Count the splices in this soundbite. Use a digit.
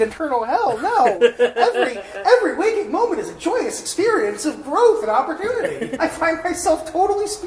1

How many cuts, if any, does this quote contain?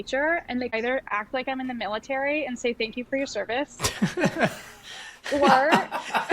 1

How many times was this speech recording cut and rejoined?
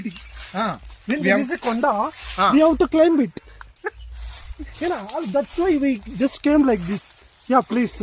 0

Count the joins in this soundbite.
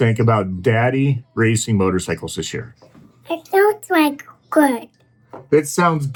0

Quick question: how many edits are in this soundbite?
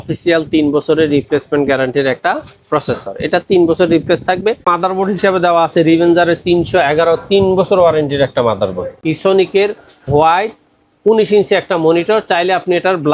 2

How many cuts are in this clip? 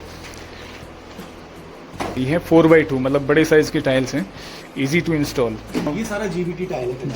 2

